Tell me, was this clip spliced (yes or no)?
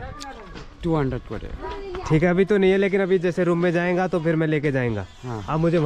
no